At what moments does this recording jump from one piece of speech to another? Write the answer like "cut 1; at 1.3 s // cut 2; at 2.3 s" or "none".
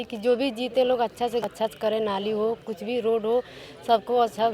cut 1; at 1.5 s